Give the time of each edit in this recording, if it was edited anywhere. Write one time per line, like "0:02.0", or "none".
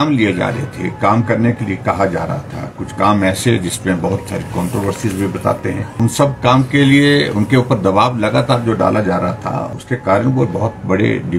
0:05.9
0:09.7